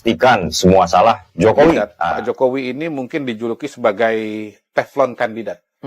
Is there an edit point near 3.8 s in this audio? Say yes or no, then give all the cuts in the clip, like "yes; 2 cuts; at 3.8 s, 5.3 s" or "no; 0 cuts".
no; 1 cut; at 1.9 s